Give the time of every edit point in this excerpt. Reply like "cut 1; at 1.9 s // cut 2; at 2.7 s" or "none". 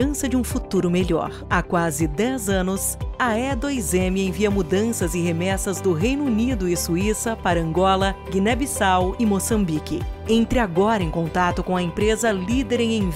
none